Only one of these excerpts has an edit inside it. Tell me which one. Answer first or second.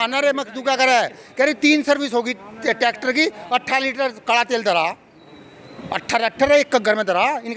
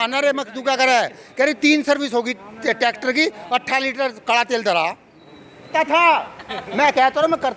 second